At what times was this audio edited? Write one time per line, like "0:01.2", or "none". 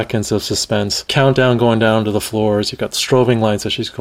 0:01.1